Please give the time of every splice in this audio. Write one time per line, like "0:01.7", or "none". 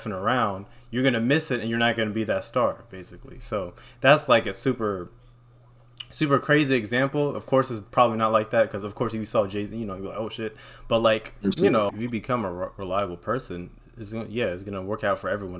0:11.9

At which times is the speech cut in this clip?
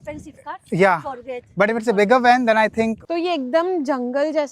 0:03.0

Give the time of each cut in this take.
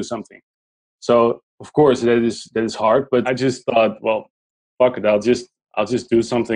0:03.3

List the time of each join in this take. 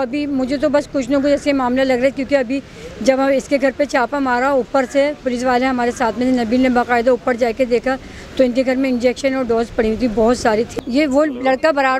0:10.7

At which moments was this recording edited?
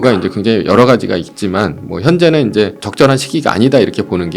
0:02.8

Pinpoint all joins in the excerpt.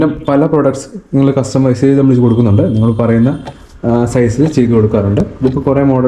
none

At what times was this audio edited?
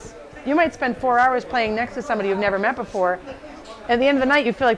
none

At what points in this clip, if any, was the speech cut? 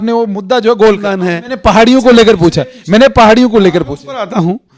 0:01.1

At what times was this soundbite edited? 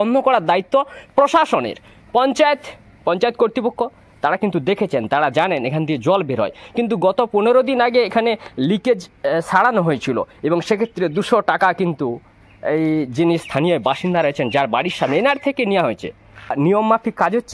none

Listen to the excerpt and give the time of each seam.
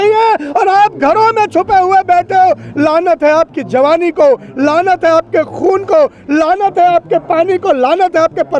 none

